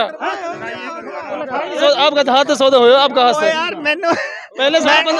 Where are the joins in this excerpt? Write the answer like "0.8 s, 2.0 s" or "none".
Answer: 1.8 s